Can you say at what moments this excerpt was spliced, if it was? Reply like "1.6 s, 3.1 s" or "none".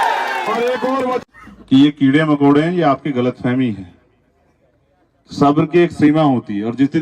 1.2 s